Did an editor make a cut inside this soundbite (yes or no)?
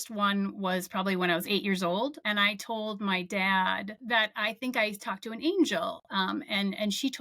yes